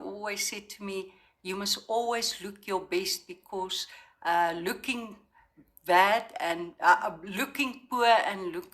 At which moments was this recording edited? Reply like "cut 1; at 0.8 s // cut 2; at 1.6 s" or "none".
none